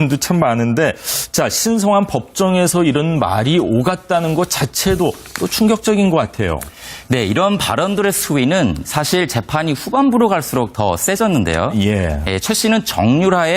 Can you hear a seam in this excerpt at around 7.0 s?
no; 1 cut; at 3.1 s

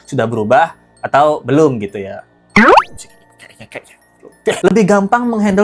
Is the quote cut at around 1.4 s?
no; 1 cut; at 4.6 s

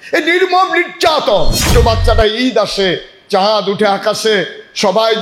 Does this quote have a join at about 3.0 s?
no; 1 cut; at 1.7 s

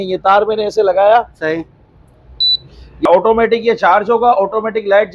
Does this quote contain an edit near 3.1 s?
yes; 1 cut; at 3.1 s

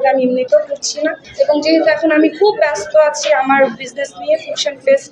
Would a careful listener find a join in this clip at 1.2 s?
yes; 1 cut; at 1.2 s

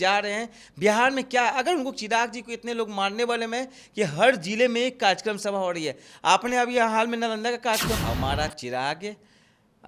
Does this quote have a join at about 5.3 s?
no; 1 cut; at 8.0 s

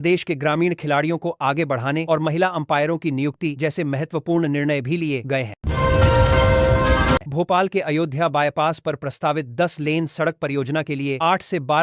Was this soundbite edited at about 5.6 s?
yes; 2 cuts; at 5.6 s, 7.3 s

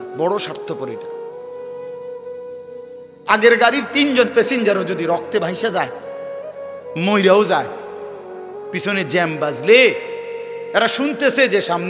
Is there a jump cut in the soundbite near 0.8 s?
yes; 2 cuts; at 0.8 s, 3.2 s

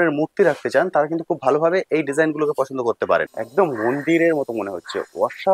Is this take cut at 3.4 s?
yes; 1 cut; at 3.4 s

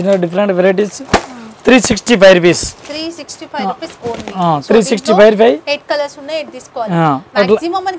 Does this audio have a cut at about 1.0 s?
no; 0 cuts

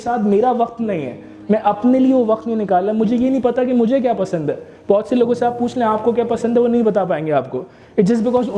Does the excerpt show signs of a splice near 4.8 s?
no; 0 cuts

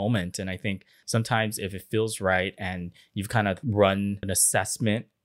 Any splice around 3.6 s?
yes; 3 cuts; at 0.9 s, 3.6 s, 4.2 s

